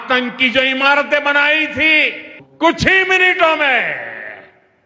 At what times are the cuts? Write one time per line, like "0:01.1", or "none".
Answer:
0:02.4